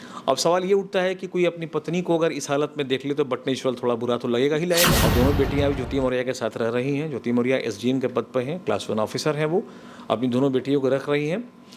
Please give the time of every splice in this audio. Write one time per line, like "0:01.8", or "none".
0:04.9